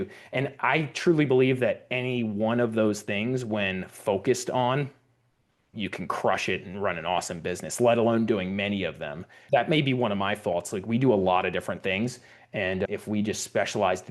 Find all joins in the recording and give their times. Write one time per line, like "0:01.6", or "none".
0:09.4
0:12.9